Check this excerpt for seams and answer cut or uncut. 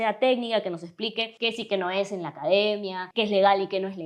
cut